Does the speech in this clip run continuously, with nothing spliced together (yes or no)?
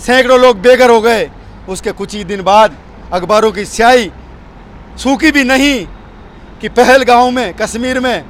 yes